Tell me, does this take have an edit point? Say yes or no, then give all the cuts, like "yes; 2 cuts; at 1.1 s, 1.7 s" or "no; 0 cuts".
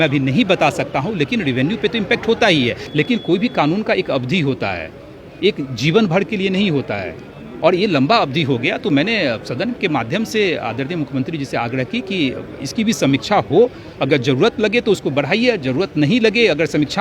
yes; 1 cut; at 2.8 s